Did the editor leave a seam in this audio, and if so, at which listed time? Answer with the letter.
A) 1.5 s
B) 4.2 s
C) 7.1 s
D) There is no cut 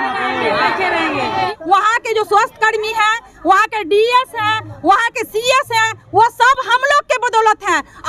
A